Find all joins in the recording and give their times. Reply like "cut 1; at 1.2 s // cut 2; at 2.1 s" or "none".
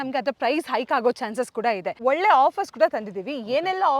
cut 1; at 1.9 s